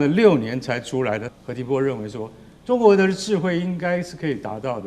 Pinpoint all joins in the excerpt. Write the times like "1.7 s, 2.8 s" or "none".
1.2 s